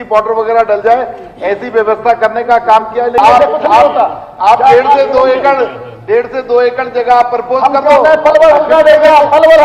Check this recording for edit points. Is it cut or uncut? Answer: cut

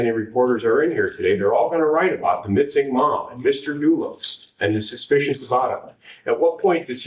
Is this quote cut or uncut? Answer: uncut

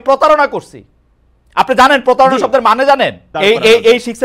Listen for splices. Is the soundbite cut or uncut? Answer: cut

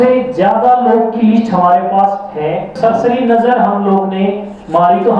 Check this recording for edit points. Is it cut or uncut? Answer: cut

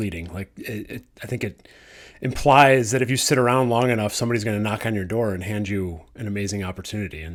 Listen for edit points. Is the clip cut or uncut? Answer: uncut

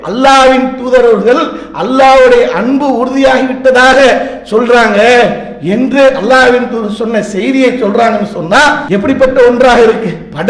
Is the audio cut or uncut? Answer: cut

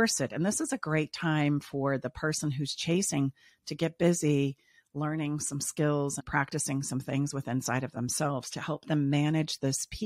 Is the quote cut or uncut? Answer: uncut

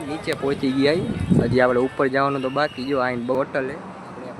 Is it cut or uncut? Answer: cut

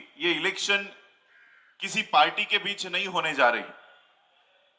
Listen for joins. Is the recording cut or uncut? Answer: uncut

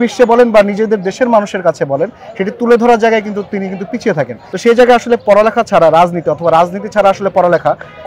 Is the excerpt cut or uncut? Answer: cut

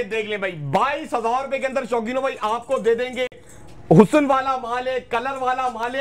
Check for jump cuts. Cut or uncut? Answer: uncut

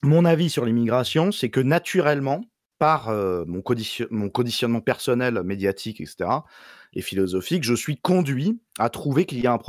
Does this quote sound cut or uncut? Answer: uncut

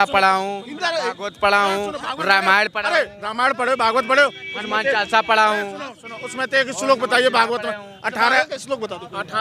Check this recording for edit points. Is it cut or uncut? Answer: uncut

